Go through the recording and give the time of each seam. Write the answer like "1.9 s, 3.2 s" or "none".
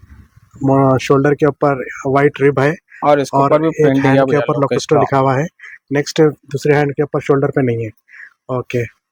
none